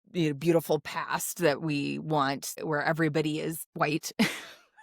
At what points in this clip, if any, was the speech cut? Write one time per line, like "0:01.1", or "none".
0:02.5
0:03.6